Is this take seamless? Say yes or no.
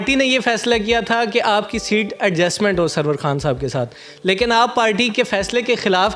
yes